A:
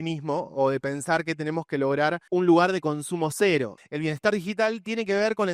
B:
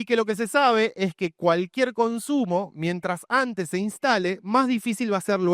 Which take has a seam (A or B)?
A